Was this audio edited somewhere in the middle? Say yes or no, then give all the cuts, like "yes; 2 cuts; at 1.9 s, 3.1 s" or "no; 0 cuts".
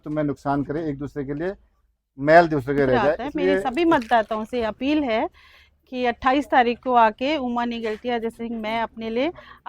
yes; 1 cut; at 3.7 s